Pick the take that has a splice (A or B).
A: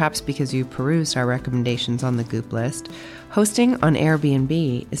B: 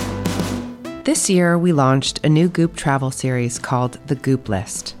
B